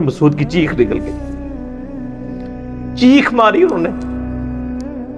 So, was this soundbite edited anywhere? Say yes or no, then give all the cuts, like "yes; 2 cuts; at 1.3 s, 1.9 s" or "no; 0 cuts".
yes; 1 cut; at 4.3 s